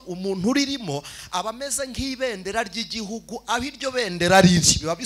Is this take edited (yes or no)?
no